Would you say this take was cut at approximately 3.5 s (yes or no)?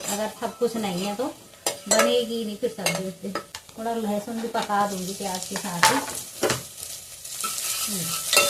yes